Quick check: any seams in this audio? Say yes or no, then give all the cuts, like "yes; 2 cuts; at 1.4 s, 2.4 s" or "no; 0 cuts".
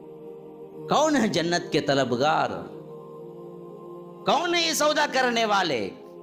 no; 0 cuts